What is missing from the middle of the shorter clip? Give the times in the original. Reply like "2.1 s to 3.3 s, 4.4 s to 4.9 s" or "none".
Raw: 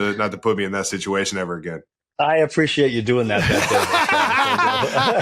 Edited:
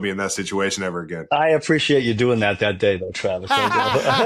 1.7 s to 2.0 s

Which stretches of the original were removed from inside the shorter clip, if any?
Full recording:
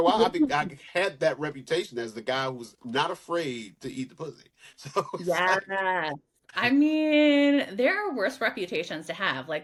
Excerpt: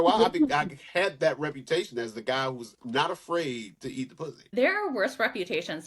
4.5 s to 7.7 s

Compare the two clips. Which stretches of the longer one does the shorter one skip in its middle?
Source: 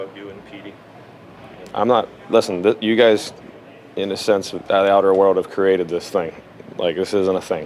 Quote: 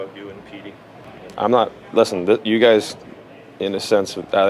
1.0 s to 1.4 s

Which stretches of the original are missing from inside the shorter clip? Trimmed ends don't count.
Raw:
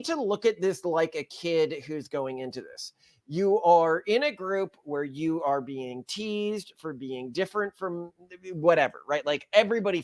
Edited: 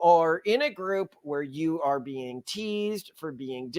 none

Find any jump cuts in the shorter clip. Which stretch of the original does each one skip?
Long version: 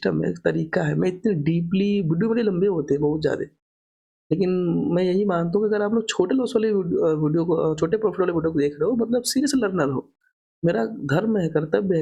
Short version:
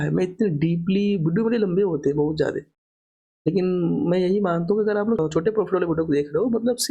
6.0 s to 7.7 s

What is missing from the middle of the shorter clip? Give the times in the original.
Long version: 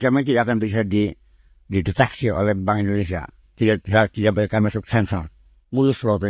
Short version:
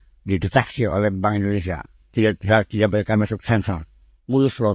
none

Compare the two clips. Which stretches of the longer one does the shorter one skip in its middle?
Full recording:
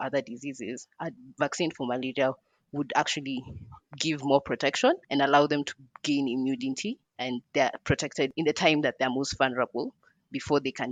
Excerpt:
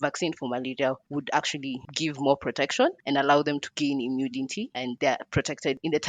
2.4 s to 2.7 s, 3.5 s to 3.9 s, 5.7 s to 6.0 s, 7.1 s to 7.4 s

